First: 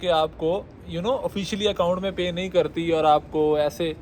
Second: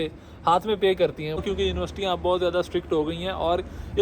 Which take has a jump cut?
second; 1 cut; at 1.4 s

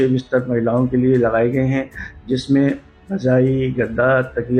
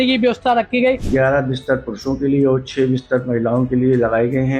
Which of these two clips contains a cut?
second; 1 cut; at 1.0 s

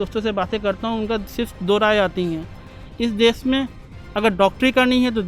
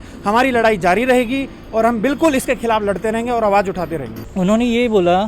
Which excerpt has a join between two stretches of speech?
second; 1 cut; at 4.2 s

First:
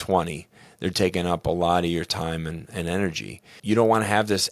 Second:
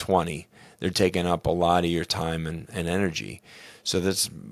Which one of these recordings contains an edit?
first; 1 cut; at 3.6 s

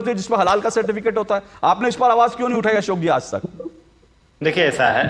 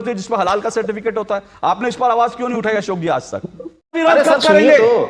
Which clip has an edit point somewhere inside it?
second; 1 cut; at 4.0 s

